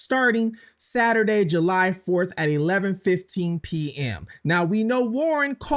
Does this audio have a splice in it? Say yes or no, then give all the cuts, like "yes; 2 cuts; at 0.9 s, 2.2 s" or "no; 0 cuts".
no; 0 cuts